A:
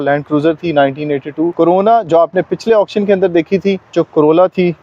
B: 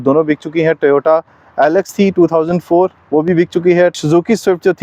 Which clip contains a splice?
A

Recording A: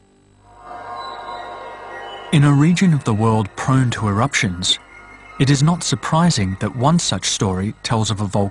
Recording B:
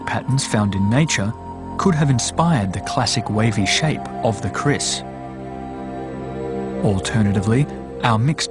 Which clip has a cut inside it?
B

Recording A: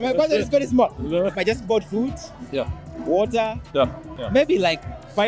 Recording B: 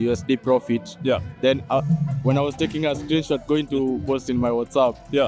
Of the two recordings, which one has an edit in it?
A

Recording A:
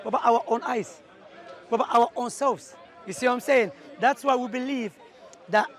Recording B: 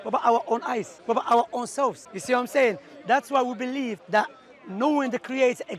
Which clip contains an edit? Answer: B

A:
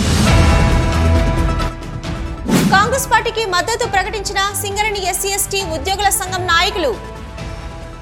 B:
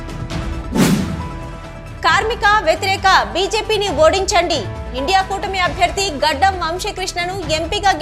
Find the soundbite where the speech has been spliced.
B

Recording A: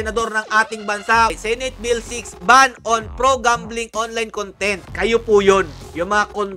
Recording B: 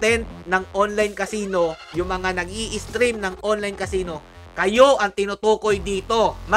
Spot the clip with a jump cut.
A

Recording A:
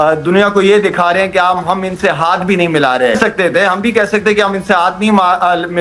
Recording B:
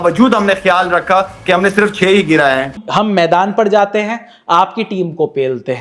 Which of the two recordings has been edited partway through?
A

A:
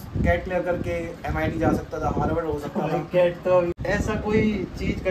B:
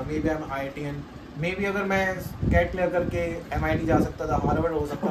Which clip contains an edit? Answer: A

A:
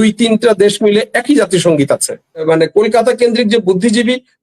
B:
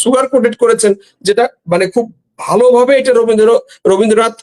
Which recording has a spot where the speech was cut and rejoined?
A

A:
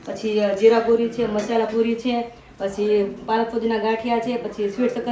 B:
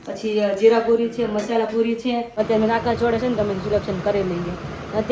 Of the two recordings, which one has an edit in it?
B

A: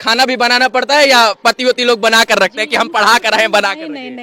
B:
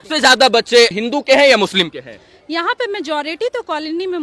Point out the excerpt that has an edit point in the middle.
B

